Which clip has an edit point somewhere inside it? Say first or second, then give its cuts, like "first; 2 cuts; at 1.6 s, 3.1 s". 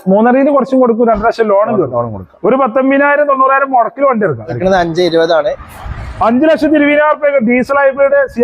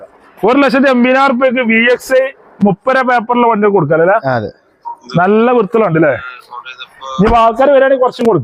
first; 1 cut; at 4.6 s